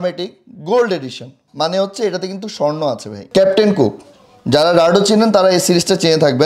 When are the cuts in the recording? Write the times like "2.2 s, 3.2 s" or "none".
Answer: 3.1 s